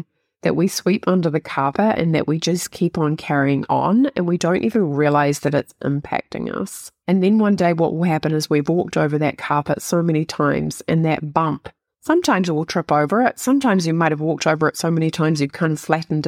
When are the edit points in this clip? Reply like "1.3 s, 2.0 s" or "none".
6.9 s